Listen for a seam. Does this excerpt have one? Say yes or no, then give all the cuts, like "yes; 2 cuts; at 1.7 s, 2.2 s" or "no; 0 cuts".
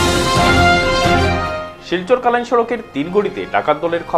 no; 0 cuts